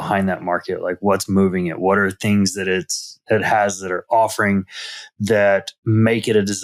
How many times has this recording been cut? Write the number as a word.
zero